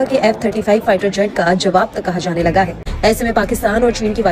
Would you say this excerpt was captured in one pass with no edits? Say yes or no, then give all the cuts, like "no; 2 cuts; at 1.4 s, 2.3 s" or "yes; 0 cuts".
no; 1 cut; at 2.8 s